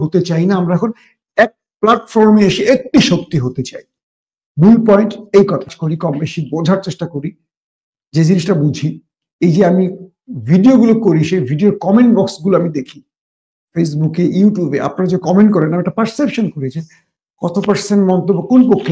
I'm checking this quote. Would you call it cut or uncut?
cut